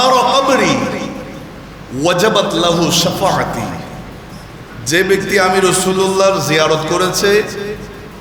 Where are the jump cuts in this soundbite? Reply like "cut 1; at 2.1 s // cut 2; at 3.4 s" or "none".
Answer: none